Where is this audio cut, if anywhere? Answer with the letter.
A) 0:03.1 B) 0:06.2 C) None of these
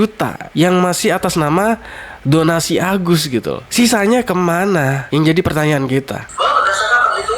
B